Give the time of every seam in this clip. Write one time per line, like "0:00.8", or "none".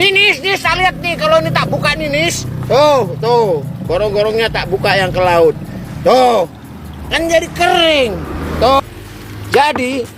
0:08.8